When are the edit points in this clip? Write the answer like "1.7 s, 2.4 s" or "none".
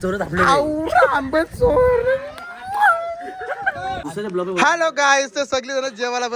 4.1 s

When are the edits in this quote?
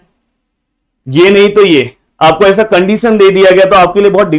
none

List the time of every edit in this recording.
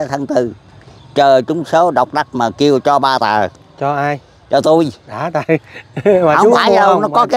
none

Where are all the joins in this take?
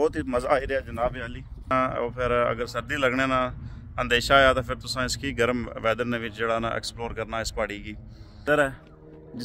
1.7 s, 8.4 s

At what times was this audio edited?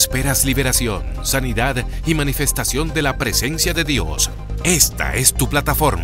none

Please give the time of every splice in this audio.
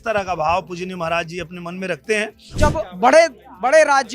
2.6 s

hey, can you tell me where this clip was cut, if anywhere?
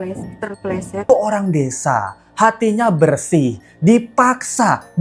1.1 s

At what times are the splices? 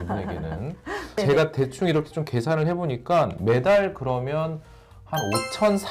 1.2 s

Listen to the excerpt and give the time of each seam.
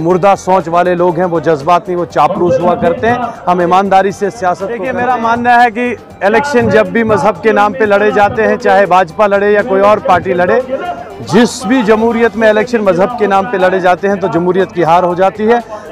4.8 s

